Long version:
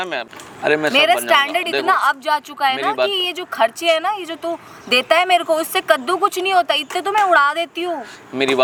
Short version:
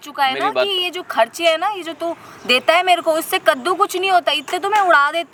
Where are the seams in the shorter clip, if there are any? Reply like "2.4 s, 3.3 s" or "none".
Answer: none